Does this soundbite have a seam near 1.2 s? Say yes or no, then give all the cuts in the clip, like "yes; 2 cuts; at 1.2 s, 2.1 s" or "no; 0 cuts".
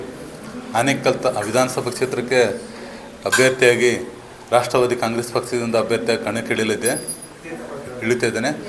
no; 0 cuts